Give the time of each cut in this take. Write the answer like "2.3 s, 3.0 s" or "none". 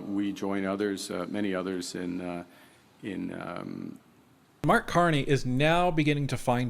4.6 s